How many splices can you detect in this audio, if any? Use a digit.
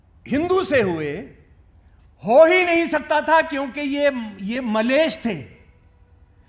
0